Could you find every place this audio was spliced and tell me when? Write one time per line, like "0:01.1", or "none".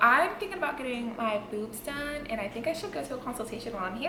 none